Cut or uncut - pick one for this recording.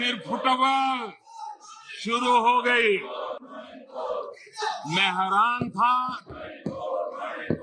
uncut